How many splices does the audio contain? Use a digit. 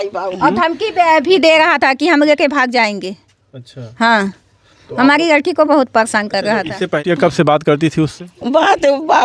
1